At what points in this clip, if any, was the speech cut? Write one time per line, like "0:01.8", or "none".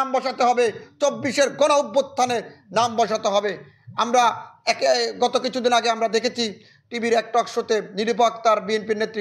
none